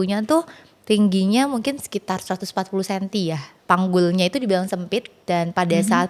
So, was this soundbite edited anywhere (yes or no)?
yes